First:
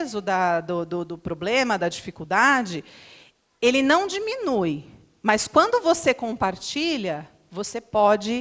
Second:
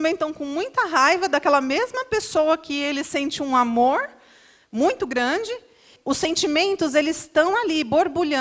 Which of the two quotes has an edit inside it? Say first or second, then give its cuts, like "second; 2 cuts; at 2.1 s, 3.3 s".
second; 1 cut; at 5.9 s